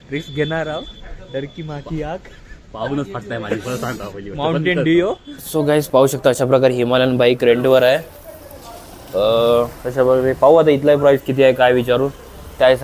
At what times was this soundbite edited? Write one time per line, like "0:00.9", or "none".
0:05.3